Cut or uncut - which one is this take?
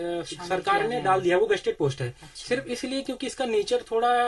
uncut